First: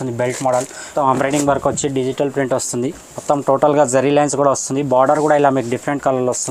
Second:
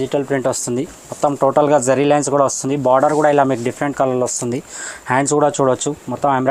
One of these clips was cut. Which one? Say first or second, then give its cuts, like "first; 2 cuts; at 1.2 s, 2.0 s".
first; 1 cut; at 0.9 s